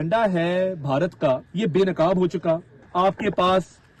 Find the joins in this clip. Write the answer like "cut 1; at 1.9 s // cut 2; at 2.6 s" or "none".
cut 1; at 1.5 s // cut 2; at 2.8 s